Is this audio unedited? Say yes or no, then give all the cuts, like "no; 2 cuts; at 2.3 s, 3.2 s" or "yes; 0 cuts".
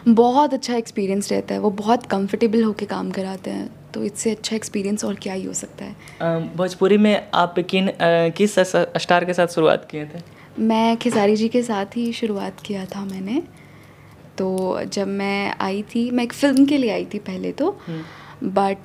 yes; 0 cuts